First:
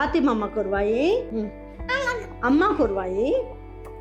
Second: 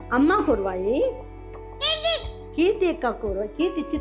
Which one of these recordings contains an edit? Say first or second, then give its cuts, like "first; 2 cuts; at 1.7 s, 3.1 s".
first; 1 cut; at 1.3 s